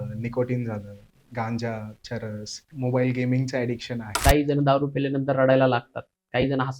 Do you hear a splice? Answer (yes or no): yes